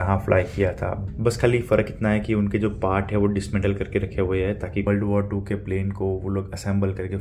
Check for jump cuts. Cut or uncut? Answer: cut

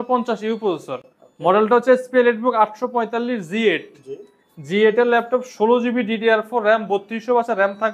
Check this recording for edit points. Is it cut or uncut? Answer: uncut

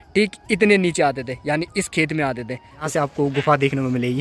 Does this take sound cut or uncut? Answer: cut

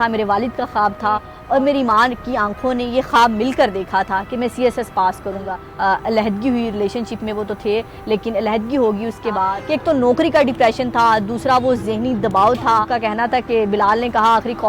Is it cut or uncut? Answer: cut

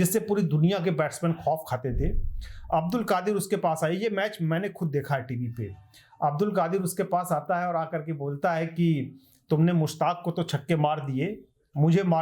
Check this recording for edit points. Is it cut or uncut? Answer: uncut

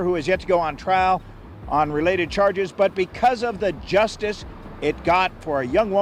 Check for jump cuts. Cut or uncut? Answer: uncut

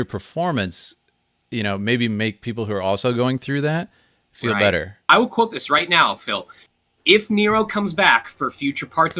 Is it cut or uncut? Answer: cut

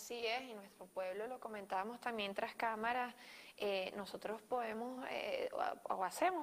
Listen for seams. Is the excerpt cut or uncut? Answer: cut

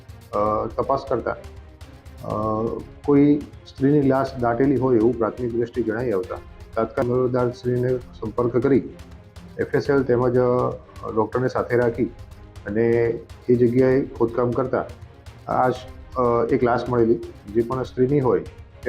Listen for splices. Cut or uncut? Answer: uncut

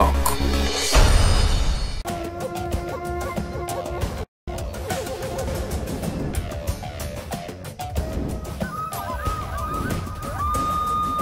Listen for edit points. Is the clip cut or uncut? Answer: uncut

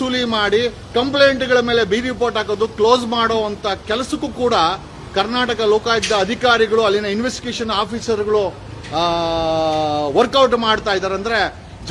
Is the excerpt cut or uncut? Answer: uncut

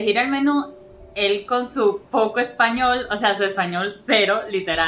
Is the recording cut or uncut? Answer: uncut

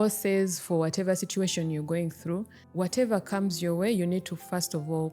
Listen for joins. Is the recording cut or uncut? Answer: cut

